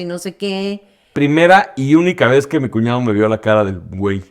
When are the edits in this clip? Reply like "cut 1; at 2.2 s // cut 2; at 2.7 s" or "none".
cut 1; at 1.1 s